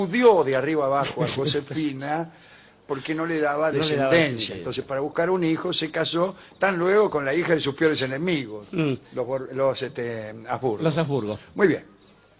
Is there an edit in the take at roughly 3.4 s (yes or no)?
yes